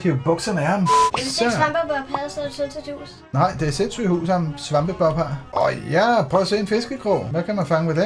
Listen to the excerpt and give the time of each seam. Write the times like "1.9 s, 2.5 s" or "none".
1.0 s, 5.4 s